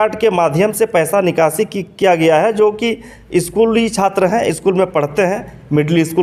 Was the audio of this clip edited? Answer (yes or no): no